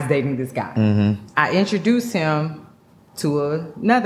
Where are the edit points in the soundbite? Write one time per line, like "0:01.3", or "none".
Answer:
0:01.3